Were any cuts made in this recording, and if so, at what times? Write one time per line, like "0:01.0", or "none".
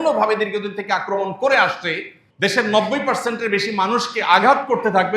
0:02.2